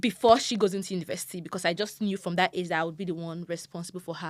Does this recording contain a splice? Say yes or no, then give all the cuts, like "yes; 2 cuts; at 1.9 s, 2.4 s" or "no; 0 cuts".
no; 0 cuts